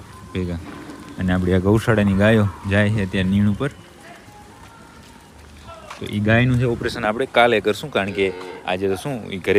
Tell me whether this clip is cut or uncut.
uncut